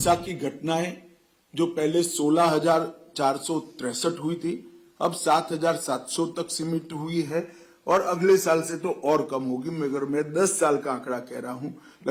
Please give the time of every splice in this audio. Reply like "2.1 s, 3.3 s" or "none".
none

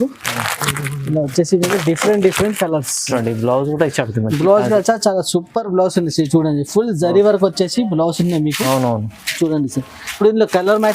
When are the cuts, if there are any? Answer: 3.0 s

